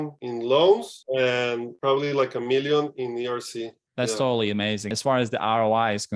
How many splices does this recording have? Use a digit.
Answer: 1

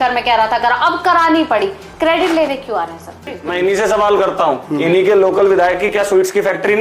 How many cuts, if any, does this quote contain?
1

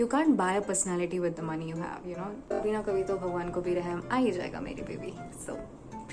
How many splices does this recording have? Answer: 1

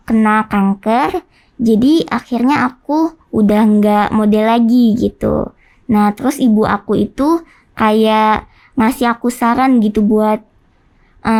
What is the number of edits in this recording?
0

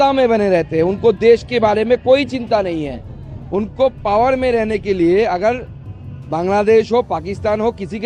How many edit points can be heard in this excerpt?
0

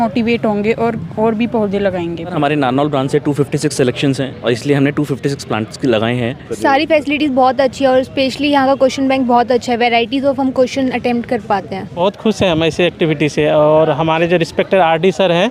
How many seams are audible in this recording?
3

